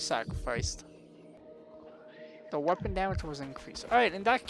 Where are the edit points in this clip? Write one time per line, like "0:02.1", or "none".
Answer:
0:01.4